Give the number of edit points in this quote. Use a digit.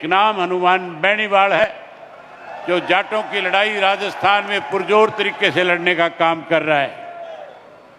1